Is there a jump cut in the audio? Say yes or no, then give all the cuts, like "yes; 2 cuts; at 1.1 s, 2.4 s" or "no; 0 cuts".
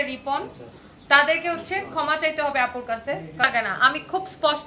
yes; 1 cut; at 3.5 s